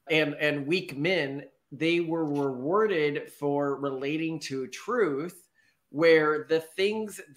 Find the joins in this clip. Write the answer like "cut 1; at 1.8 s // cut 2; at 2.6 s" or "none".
none